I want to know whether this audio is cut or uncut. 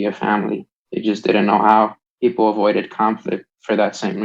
cut